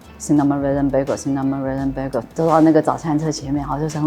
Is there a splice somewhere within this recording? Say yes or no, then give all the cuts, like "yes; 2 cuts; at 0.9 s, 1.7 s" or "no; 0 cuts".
yes; 1 cut; at 2.3 s